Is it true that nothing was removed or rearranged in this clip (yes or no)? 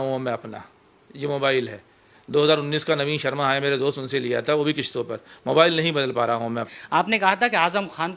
no